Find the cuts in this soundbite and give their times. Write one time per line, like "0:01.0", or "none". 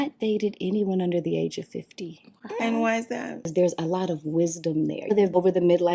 0:03.5